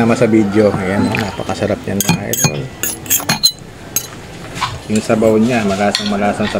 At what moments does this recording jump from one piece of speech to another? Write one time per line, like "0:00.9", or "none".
0:04.3